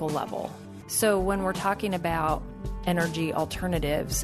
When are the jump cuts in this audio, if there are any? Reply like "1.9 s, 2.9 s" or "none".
none